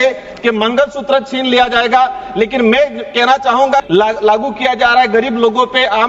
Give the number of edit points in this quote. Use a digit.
1